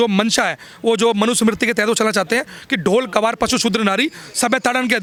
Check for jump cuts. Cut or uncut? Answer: uncut